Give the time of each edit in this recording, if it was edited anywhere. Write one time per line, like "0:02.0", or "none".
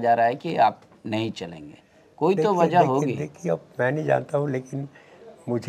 none

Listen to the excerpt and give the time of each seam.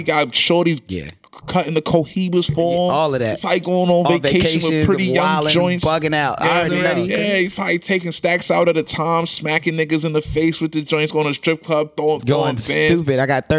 0:07.0

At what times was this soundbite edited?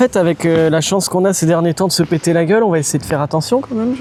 none

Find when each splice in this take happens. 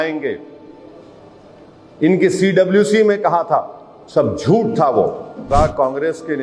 0:05.5

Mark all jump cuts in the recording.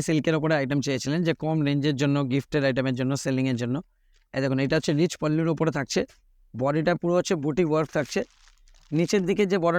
none

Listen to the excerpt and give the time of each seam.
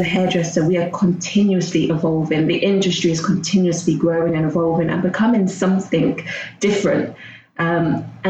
none

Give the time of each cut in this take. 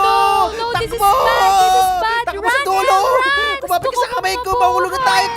0:03.5

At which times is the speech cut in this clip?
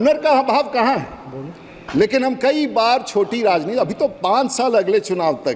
none

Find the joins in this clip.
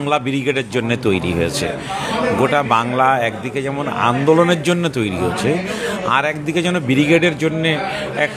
none

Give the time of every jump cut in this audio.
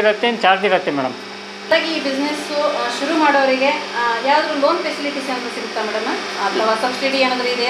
0:01.7

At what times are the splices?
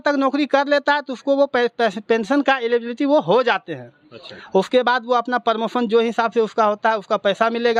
none

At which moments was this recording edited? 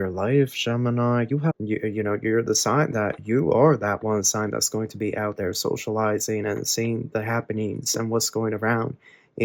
0:01.5

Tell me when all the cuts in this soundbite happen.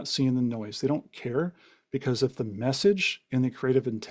none

